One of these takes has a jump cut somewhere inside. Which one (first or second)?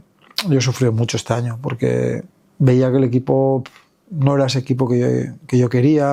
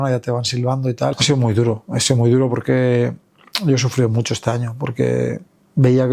second